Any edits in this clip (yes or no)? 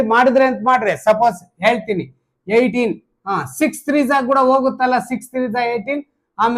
no